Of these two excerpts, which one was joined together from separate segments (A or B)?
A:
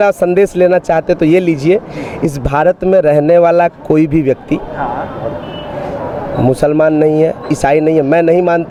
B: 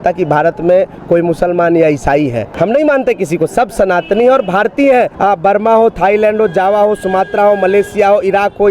B